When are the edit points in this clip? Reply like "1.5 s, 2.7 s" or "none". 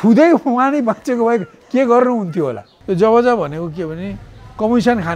2.7 s